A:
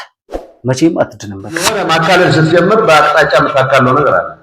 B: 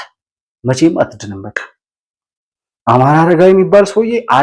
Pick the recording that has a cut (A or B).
A